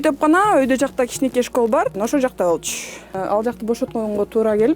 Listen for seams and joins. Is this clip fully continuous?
no; 2 cuts; at 1.9 s, 3.1 s

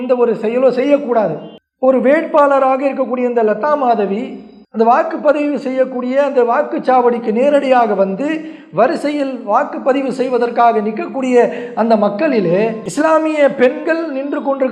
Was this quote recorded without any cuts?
yes; 0 cuts

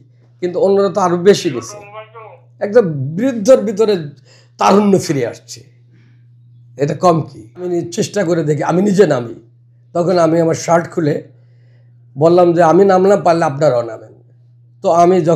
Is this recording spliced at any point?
yes; 1 cut; at 7.7 s

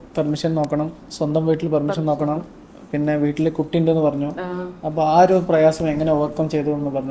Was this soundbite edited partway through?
no; 0 cuts

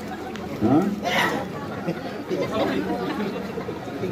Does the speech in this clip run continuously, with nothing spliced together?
yes; 0 cuts

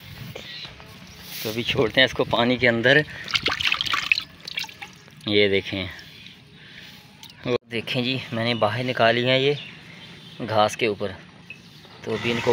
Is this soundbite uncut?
no; 1 cut; at 7.6 s

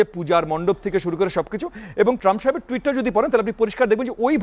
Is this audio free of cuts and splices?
no; 1 cut; at 2.2 s

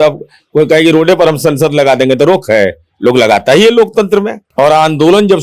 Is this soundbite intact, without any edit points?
no; 1 cut; at 4.4 s

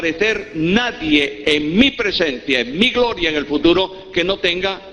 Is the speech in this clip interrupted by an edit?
yes; 1 cut; at 1.6 s

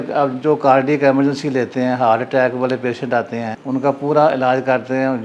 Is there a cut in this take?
yes; 1 cut; at 3.5 s

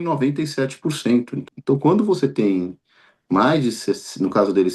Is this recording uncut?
no; 1 cut; at 1.4 s

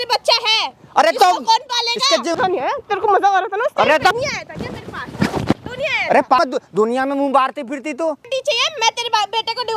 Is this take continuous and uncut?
no; 4 cuts; at 2.3 s, 4.1 s, 6.4 s, 8.2 s

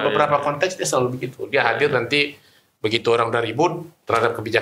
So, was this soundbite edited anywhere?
no; 0 cuts

